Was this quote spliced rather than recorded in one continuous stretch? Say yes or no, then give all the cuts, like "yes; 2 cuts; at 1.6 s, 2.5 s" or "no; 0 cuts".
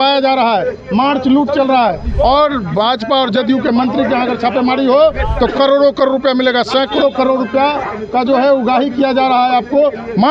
no; 0 cuts